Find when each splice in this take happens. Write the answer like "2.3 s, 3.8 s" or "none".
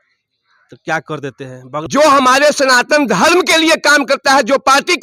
1.7 s